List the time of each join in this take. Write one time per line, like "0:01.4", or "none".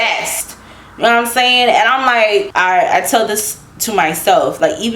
0:02.5